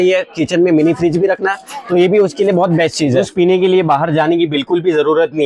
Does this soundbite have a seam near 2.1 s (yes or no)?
no